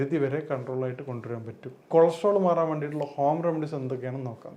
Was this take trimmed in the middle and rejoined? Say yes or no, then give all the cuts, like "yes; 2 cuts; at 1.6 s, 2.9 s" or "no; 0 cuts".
yes; 1 cut; at 1.9 s